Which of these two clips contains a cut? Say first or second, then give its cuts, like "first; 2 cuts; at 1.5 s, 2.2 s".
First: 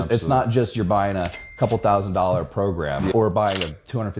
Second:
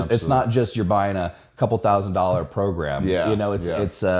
first; 1 cut; at 3.1 s